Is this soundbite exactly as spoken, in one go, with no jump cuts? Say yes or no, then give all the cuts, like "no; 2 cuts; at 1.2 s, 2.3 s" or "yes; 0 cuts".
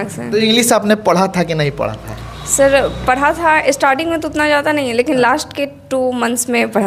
yes; 0 cuts